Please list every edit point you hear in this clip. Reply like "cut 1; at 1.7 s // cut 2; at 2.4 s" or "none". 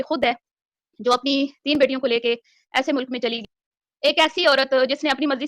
cut 1; at 3.4 s